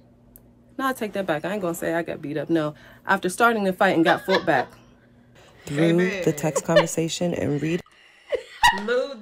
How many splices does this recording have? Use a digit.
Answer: 1